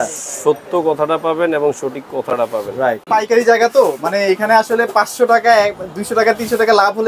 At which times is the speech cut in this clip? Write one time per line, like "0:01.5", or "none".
0:03.1